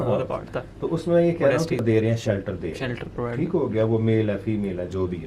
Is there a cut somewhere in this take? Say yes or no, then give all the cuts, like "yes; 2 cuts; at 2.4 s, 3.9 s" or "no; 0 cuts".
yes; 1 cut; at 1.8 s